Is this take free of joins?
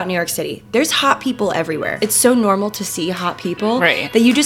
no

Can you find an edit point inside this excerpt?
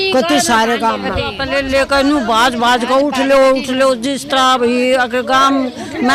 no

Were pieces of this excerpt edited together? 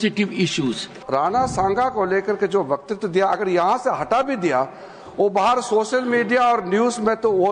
yes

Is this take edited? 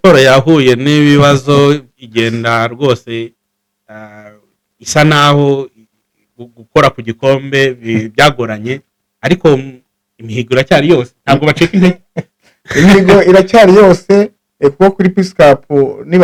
no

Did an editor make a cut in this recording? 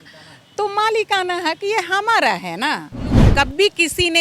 yes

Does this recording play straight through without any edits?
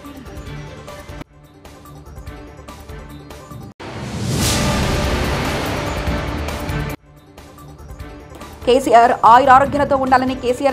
no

